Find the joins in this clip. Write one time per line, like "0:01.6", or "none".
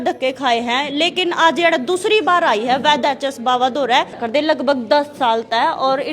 0:04.2